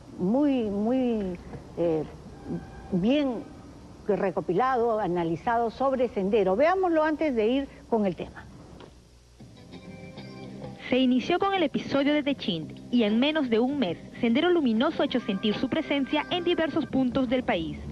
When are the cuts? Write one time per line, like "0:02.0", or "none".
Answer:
none